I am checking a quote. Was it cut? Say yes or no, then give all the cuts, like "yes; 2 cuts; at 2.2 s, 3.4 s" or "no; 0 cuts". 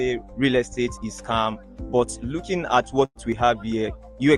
no; 0 cuts